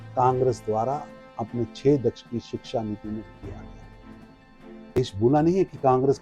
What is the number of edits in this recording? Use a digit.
2